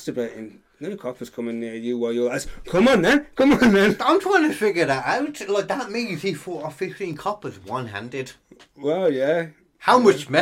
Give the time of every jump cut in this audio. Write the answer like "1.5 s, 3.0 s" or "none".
none